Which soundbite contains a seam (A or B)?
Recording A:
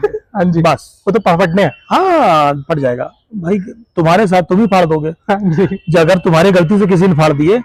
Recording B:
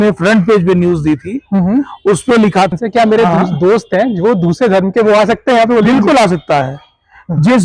B